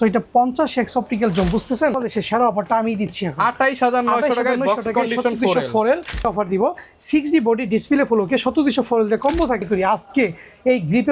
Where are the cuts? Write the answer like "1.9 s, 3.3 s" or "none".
1.9 s, 6.2 s, 9.6 s